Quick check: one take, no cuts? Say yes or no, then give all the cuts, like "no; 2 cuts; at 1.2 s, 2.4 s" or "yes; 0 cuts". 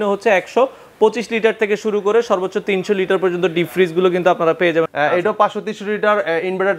no; 1 cut; at 4.9 s